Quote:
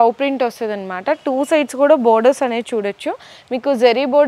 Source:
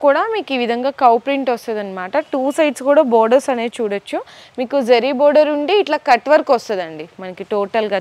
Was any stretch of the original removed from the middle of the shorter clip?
no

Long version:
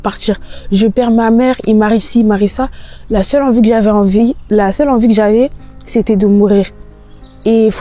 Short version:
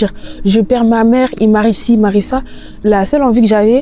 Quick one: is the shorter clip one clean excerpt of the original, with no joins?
no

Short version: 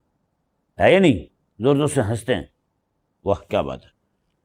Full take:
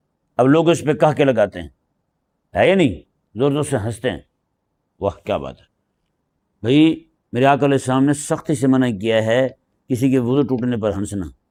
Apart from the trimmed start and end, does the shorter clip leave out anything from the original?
no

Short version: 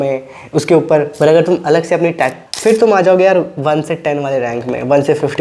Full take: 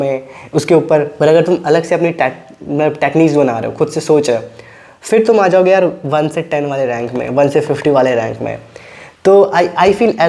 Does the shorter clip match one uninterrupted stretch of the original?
no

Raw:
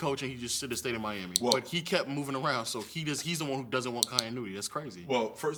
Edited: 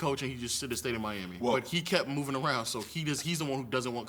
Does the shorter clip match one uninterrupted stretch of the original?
yes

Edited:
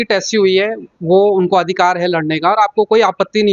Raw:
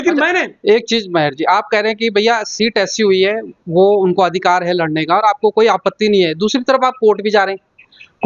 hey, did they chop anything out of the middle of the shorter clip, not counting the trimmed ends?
no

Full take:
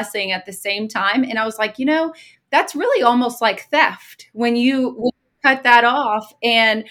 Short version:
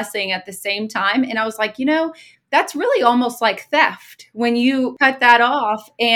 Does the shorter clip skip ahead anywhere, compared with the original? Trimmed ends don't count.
yes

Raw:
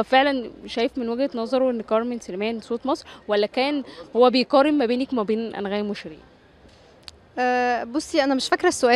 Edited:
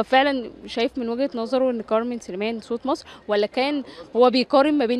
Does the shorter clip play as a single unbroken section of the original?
yes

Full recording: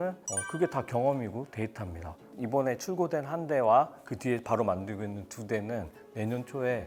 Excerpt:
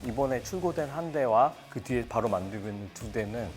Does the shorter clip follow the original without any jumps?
yes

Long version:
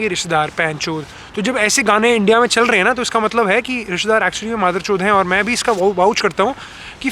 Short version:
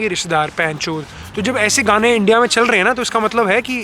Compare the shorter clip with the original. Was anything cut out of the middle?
no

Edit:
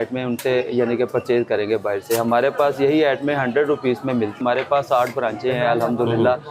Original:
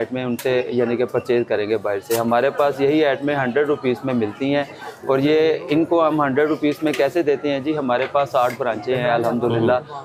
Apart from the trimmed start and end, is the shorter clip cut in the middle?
yes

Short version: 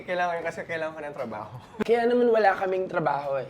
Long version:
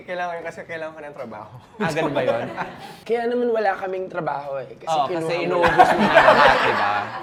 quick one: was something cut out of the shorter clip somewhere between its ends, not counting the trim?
yes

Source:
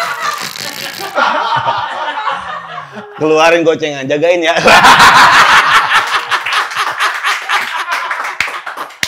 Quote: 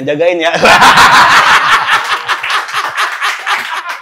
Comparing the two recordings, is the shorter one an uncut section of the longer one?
yes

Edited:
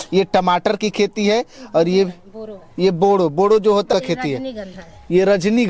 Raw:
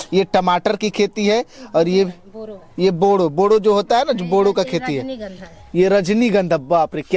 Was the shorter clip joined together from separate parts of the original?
yes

